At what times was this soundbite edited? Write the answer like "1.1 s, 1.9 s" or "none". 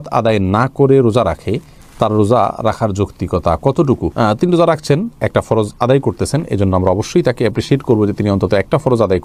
none